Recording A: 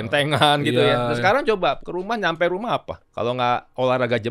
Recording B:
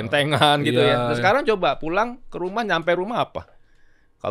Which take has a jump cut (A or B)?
A